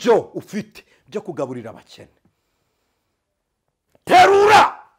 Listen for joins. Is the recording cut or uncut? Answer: uncut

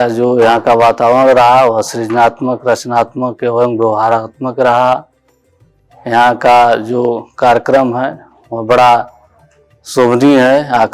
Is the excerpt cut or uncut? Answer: uncut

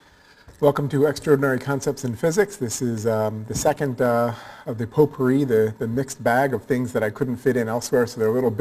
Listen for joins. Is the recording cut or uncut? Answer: cut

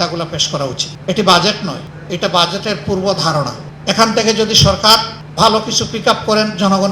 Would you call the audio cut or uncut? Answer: cut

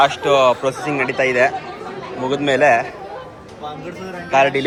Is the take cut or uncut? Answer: uncut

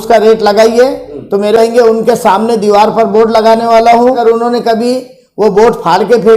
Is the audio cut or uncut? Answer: cut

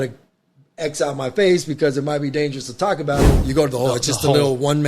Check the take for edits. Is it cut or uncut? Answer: cut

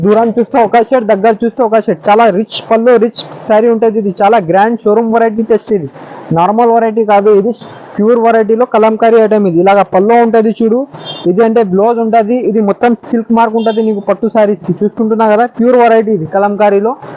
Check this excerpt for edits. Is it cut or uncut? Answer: uncut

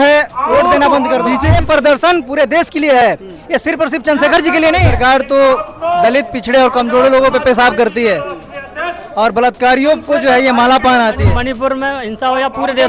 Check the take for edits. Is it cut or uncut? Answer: cut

